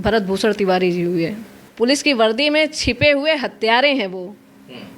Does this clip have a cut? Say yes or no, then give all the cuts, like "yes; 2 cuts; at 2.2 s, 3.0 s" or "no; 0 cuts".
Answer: yes; 1 cut; at 1.5 s